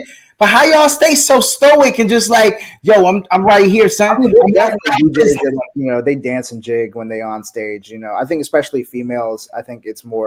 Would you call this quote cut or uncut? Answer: uncut